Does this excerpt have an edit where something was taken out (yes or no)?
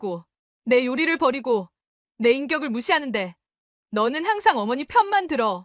no